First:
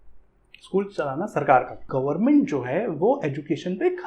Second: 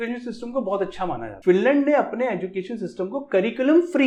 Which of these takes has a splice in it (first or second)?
first